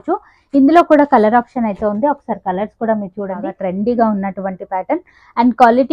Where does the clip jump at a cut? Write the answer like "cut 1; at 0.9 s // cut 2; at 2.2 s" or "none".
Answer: cut 1; at 3.5 s